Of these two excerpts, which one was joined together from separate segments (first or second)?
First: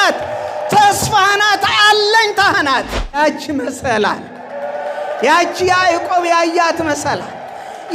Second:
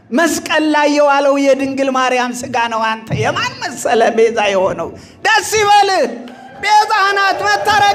first